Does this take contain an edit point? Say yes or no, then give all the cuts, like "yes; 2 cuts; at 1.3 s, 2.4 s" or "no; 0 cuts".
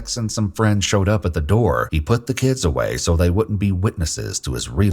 yes; 1 cut; at 1.9 s